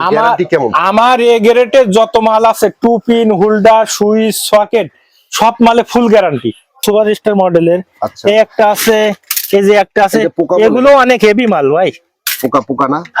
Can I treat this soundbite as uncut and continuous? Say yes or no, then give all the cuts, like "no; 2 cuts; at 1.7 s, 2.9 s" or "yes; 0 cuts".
no; 1 cut; at 6.8 s